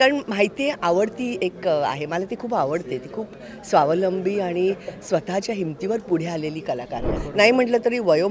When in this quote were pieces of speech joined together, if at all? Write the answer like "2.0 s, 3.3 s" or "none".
7.2 s